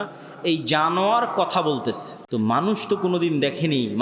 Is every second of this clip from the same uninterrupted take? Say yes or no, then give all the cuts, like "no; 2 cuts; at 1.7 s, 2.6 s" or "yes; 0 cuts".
no; 1 cut; at 2.1 s